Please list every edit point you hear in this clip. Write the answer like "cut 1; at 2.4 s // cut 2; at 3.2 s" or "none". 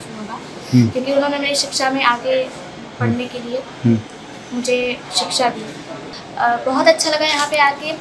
none

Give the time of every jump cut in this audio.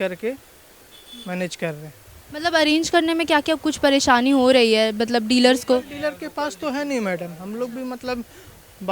none

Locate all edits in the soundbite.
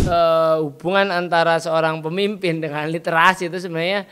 none

